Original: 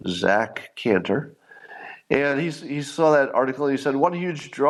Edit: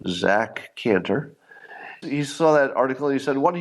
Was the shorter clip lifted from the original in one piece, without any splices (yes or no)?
no